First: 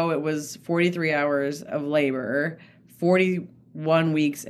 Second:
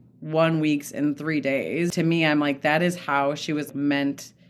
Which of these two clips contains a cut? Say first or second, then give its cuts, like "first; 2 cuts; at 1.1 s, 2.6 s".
second; 2 cuts; at 1.9 s, 3.7 s